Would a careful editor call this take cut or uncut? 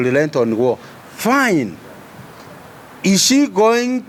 uncut